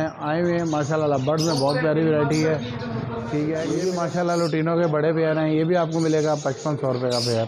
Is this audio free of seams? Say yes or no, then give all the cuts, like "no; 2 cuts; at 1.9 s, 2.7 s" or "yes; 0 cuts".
no; 1 cut; at 3.8 s